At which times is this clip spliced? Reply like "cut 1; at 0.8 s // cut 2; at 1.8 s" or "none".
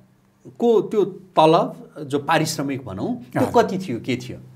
none